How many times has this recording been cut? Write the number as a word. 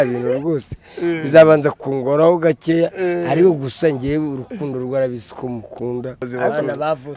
one